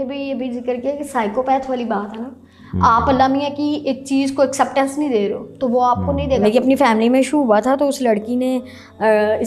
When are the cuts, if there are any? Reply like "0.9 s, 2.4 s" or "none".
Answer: 6.4 s